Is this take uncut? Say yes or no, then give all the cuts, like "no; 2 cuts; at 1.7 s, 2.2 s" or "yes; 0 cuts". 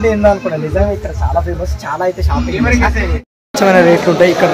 no; 1 cut; at 3.1 s